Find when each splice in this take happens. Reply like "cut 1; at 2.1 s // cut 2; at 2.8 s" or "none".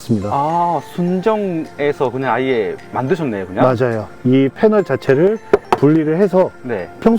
none